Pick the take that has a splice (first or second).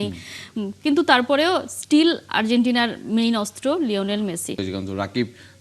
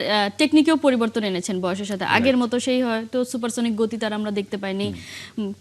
first